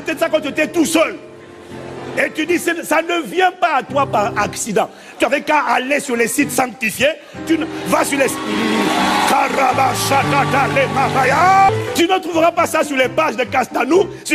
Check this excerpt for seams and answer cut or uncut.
cut